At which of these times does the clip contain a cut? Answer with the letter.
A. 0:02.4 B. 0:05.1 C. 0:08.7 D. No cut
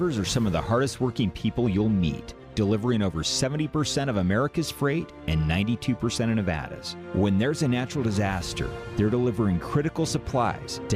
D